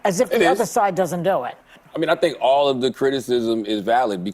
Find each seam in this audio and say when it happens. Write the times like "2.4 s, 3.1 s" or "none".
none